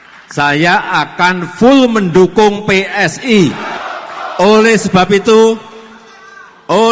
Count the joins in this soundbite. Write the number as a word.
one